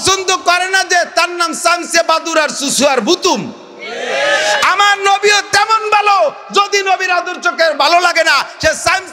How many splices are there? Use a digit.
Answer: 0